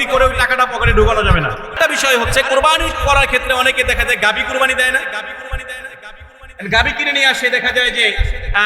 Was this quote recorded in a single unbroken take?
no; 1 cut; at 1.7 s

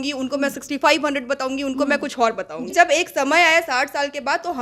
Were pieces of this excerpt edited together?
yes; 1 cut; at 2.7 s

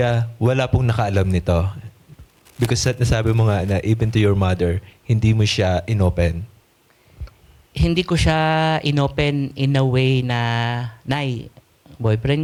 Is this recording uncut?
yes; 0 cuts

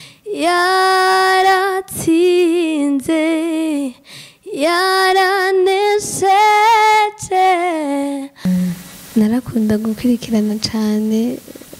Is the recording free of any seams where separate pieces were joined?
no; 1 cut; at 8.5 s

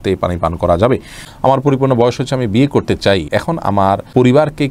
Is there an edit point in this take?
yes; 2 cuts; at 1.2 s, 3.7 s

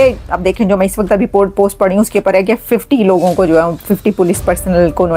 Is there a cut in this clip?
no; 0 cuts

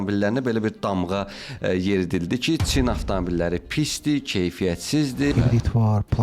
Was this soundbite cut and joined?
yes; 1 cut; at 5.3 s

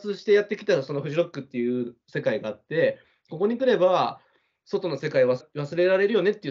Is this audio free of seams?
no; 1 cut; at 5.4 s

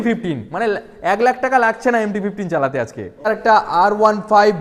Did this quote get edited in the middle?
yes; 1 cut; at 3.3 s

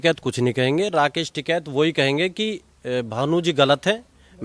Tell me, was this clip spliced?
no; 0 cuts

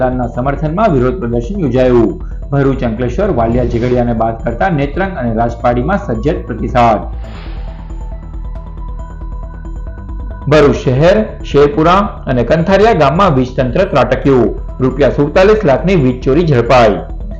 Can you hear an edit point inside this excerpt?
no; 0 cuts

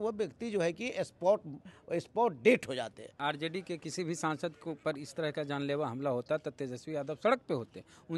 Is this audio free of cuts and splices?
no; 1 cut; at 3.2 s

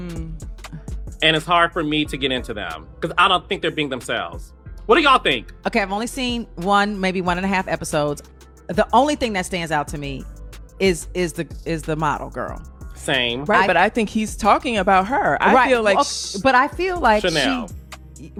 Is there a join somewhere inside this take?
no; 0 cuts

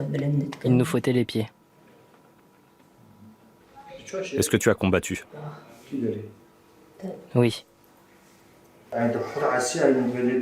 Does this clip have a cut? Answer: yes; 1 cut; at 8.8 s

